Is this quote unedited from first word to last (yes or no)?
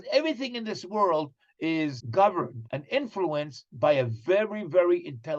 no